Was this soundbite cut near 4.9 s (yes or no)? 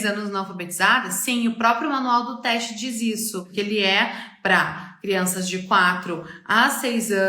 no